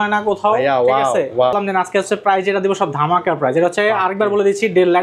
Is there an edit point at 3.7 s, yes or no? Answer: no